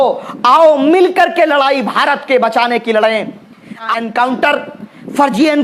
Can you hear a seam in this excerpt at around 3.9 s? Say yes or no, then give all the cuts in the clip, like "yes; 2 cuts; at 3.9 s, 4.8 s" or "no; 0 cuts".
yes; 1 cut; at 3.9 s